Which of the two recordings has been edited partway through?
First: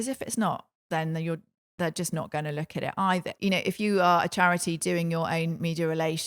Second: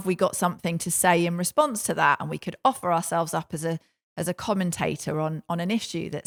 first; 1 cut; at 3.3 s

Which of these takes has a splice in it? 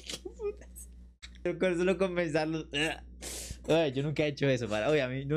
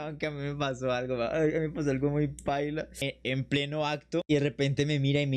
second; 2 cuts; at 2.9 s, 4.2 s

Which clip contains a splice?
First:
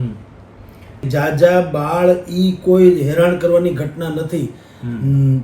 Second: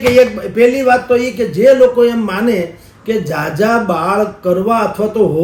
first; 1 cut; at 1.1 s

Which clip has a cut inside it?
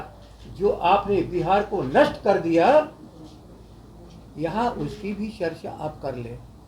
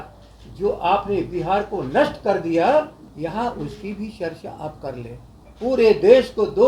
second; 2 cuts; at 3.0 s, 5.4 s

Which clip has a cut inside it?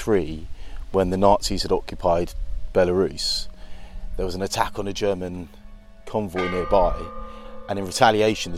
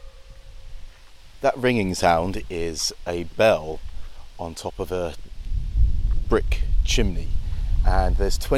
second; 1 cut; at 1.3 s

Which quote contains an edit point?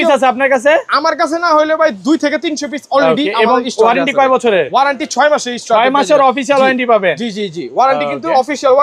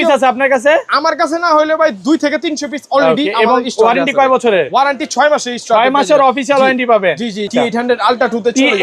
second; 1 cut; at 7.5 s

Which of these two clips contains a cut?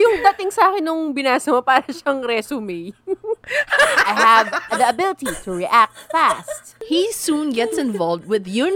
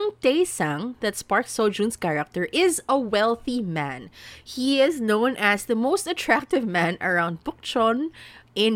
first; 2 cuts; at 3.5 s, 6.8 s

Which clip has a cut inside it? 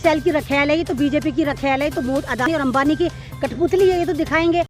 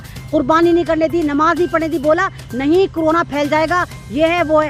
first; 1 cut; at 2.5 s

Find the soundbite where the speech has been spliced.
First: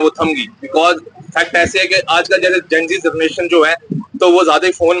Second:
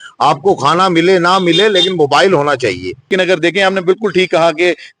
second; 1 cut; at 3.1 s

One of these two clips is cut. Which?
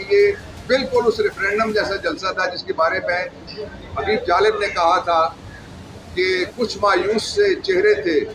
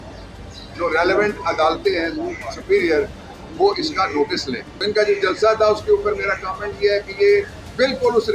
second; 1 cut; at 4.7 s

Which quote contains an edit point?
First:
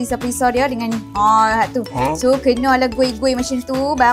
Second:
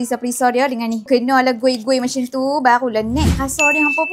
second; 1 cut; at 1.1 s

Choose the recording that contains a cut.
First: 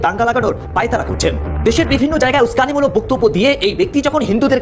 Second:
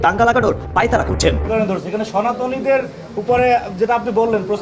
second; 1 cut; at 1.5 s

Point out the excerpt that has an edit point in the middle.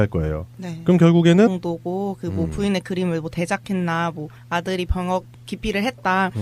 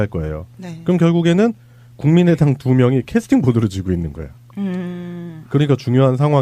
second; 1 cut; at 1.5 s

